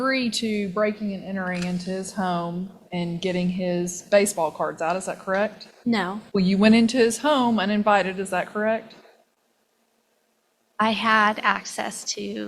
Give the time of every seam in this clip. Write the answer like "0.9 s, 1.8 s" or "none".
6.2 s